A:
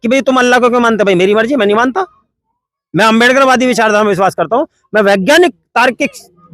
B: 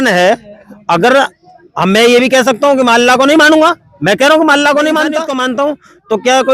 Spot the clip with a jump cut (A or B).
B